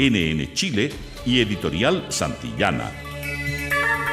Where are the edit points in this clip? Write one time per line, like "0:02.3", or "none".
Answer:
0:02.9